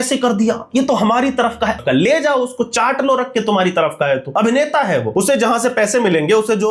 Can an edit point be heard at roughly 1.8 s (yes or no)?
yes